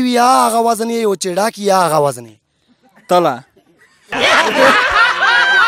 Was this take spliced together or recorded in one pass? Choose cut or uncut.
uncut